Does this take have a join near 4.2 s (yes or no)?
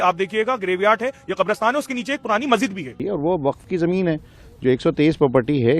no